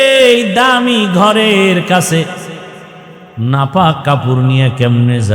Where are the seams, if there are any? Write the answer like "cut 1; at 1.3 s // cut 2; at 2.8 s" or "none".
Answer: none